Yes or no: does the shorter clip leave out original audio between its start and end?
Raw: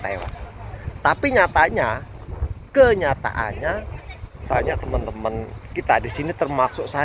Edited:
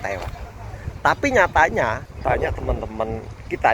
yes